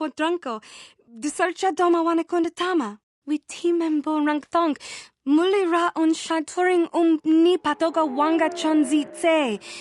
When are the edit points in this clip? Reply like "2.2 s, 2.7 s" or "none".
3.2 s